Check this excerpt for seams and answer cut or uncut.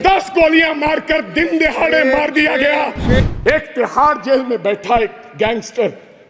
cut